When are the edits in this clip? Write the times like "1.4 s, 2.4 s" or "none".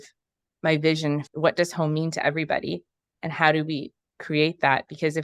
1.3 s

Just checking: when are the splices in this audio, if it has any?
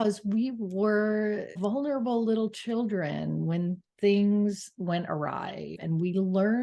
1.6 s, 5.8 s

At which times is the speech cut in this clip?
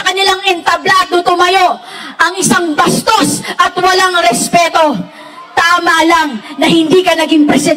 none

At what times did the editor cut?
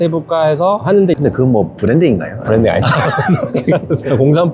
1.2 s

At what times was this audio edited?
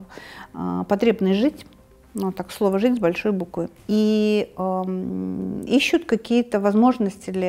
3.8 s

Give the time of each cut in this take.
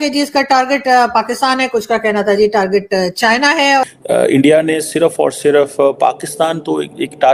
3.8 s

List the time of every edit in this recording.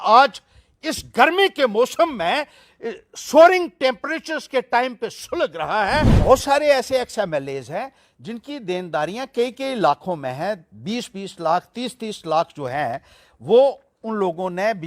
6.1 s

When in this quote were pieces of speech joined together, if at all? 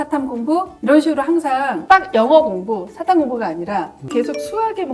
none

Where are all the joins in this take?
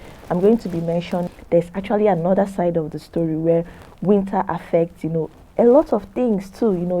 1.3 s

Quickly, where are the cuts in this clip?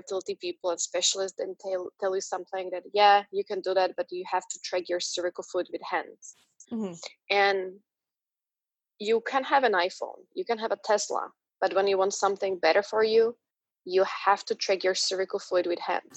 none

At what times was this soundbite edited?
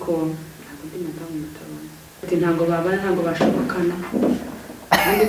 2.2 s

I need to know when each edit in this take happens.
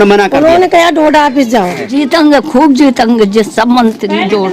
1.8 s

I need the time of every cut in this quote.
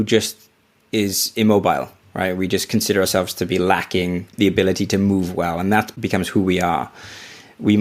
4.3 s, 5.9 s

